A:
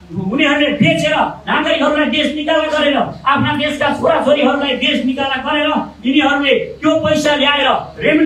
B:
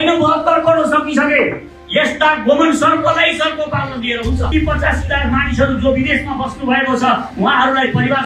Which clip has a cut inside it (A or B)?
B